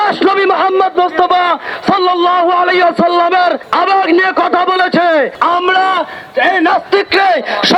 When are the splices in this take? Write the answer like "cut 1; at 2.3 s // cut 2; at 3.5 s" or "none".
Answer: cut 1; at 3.6 s // cut 2; at 5.3 s